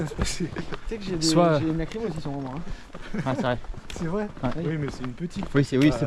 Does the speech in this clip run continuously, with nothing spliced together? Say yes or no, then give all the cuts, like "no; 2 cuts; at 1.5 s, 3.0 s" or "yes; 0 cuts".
yes; 0 cuts